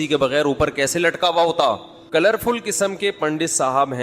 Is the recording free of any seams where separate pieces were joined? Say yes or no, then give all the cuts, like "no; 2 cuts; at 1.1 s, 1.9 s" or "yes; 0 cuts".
no; 1 cut; at 1.9 s